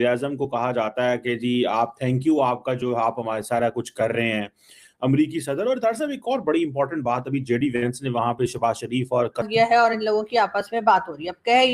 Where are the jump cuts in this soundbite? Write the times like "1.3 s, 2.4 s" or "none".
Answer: 9.4 s